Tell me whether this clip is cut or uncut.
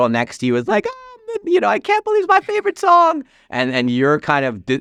uncut